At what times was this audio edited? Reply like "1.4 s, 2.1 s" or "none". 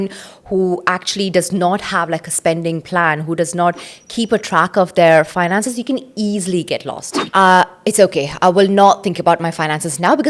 7.1 s